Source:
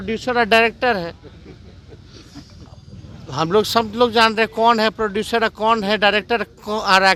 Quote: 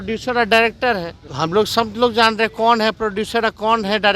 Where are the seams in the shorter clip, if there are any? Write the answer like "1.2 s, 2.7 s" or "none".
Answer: 1.2 s

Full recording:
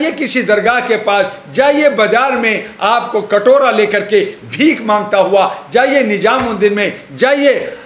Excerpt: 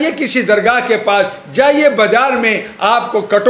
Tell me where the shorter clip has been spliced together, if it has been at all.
none

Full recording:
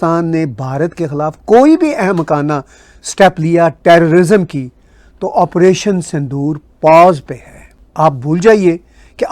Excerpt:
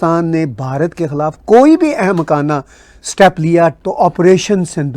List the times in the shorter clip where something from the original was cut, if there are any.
3.8 s

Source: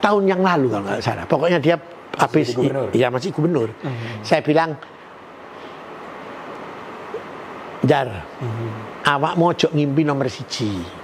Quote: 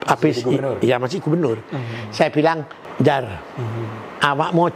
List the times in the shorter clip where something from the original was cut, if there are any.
2.8 s

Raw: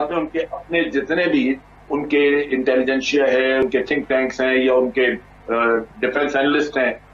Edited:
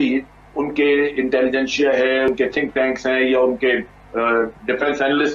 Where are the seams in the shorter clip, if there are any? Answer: none

